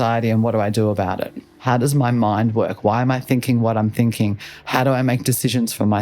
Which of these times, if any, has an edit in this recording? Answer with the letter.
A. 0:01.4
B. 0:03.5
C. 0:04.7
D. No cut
A